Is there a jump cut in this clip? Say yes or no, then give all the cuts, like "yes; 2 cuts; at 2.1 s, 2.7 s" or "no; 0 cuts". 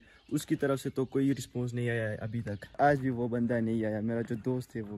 yes; 1 cut; at 2.7 s